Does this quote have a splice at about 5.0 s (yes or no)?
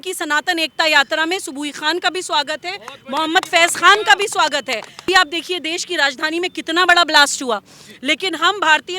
yes